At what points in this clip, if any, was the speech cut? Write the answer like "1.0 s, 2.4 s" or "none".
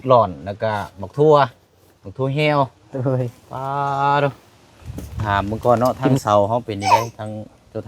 5.2 s